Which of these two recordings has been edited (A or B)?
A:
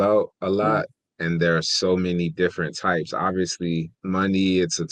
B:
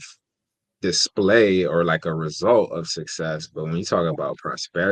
A